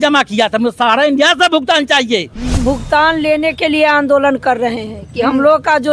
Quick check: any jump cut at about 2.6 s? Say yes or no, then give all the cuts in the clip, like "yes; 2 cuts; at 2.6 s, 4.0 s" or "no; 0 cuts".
yes; 1 cut; at 2.6 s